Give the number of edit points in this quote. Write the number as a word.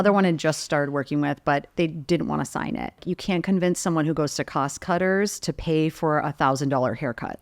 one